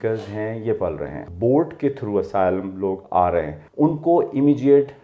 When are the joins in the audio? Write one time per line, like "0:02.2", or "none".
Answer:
0:01.3
0:03.6